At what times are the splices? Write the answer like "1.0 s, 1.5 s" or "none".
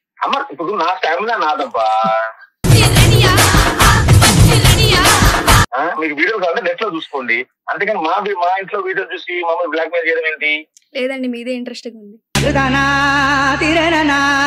none